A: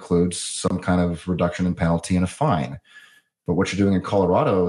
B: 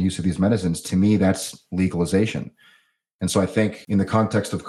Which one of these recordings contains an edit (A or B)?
B